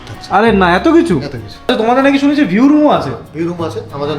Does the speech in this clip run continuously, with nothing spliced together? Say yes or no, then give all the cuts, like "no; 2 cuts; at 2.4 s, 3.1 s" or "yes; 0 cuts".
no; 1 cut; at 1.7 s